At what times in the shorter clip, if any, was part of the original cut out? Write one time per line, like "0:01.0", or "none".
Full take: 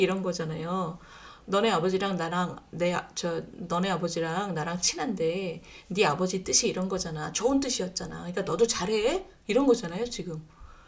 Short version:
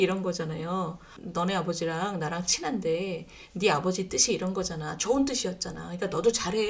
0:01.2